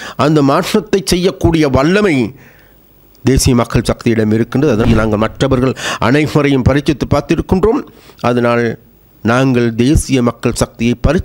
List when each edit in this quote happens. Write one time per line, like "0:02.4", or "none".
0:04.9